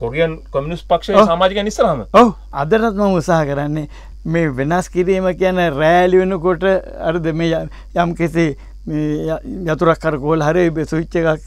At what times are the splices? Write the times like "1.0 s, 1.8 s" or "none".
2.5 s